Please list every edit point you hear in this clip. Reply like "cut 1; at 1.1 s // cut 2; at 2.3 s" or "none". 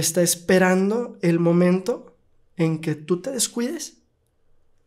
none